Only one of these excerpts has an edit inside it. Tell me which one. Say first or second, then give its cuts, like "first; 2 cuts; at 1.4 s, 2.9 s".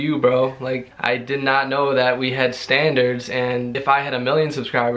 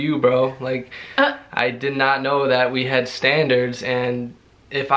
first; 2 cuts; at 0.9 s, 3.8 s